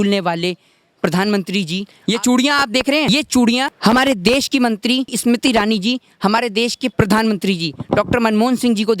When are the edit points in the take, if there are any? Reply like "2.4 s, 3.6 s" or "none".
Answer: 1.9 s, 3.1 s, 3.7 s, 5.1 s, 6.9 s